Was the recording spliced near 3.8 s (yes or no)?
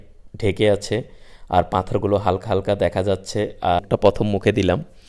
yes